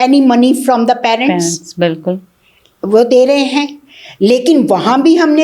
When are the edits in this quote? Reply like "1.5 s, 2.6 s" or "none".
none